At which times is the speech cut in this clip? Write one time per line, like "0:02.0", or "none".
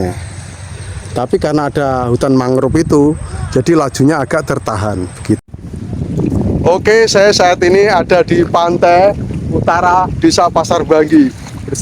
0:05.4